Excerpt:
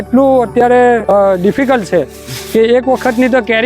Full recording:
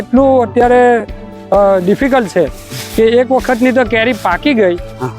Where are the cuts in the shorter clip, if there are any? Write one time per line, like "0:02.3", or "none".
0:01.0